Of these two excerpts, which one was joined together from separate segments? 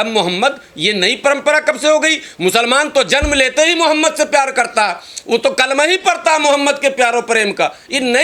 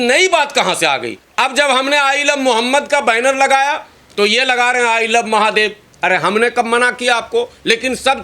second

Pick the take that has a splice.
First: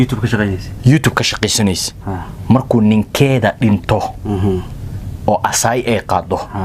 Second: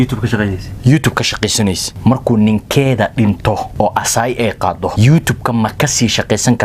second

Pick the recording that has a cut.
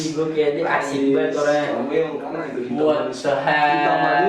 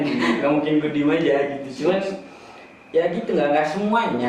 first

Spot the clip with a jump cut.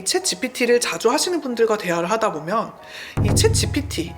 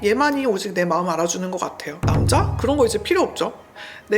second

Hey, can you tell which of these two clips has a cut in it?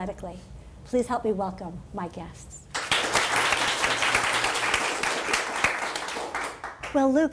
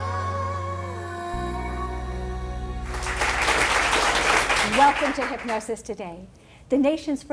second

